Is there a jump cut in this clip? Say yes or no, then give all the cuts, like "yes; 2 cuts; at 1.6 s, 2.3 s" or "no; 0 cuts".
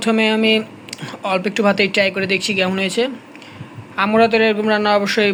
no; 0 cuts